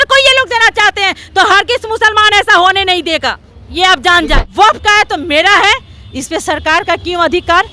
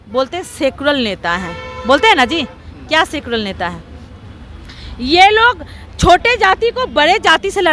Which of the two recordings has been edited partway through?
first; 1 cut; at 4.4 s

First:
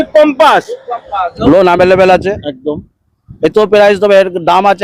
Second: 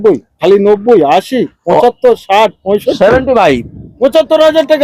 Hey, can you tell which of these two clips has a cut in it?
first; 1 cut; at 1.4 s

